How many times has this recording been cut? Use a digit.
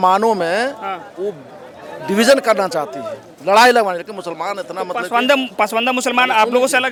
0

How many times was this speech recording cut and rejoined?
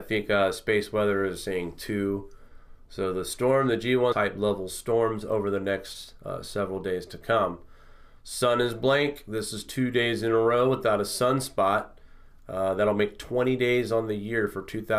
0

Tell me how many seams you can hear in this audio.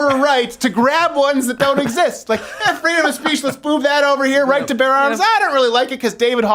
0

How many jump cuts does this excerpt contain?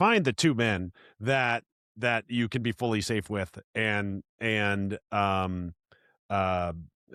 0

